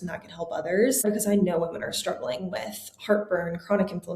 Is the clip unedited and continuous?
no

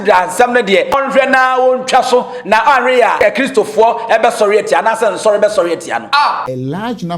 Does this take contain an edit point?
yes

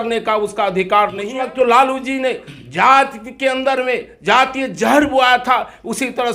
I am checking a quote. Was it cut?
yes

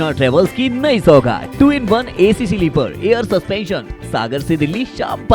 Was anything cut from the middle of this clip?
no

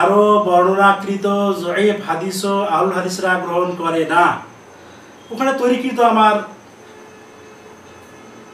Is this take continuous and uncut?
yes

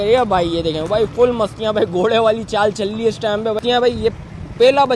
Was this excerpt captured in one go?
no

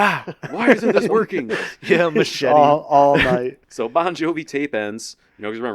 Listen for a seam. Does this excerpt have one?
yes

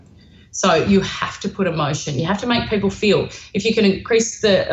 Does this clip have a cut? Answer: no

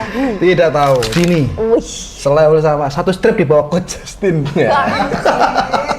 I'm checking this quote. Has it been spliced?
yes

